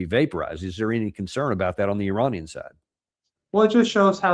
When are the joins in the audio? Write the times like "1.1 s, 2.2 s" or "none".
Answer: none